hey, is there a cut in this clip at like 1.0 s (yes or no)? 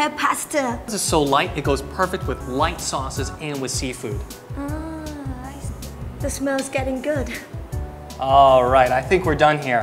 yes